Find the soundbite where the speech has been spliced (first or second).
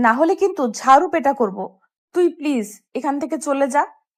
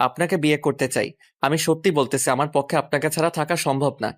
second